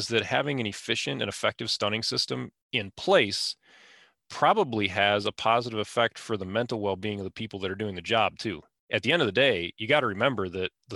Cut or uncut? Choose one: cut